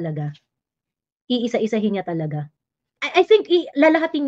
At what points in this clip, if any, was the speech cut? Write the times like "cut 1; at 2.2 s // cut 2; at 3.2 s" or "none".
cut 1; at 3.0 s